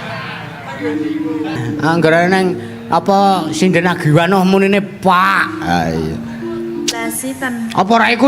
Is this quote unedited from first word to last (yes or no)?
no